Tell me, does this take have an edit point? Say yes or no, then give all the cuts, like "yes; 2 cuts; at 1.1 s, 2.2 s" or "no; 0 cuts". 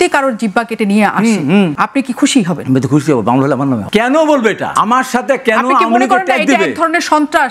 yes; 4 cuts; at 1.7 s, 2.6 s, 3.8 s, 4.6 s